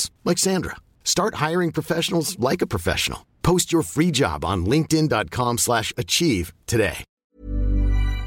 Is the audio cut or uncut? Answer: cut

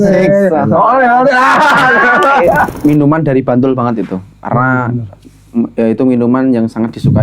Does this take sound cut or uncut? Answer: cut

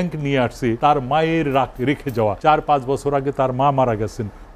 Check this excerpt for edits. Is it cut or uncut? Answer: cut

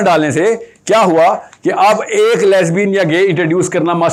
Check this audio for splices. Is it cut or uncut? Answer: uncut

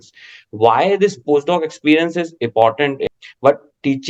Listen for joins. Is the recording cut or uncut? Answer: cut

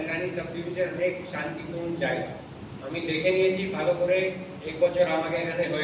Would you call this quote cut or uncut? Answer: uncut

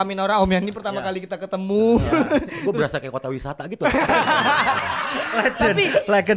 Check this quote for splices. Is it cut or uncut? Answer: uncut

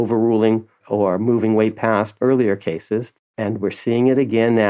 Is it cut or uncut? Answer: cut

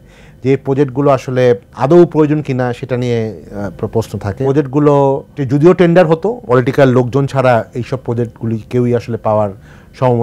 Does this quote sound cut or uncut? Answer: cut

